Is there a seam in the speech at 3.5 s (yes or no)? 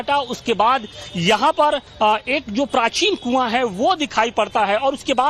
yes